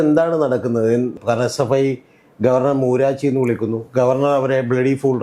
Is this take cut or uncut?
cut